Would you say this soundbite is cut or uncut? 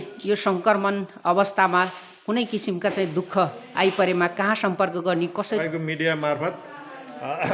cut